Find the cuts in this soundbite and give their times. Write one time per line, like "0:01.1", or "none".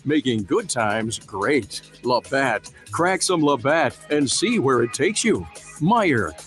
0:01.8
0:05.5